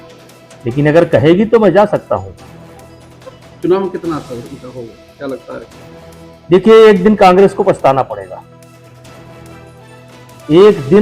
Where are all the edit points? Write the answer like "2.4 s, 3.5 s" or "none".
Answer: 8.4 s, 10.0 s